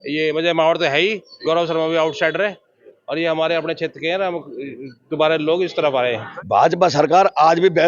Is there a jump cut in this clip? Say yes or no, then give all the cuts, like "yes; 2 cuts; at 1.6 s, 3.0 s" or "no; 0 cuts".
yes; 1 cut; at 6.3 s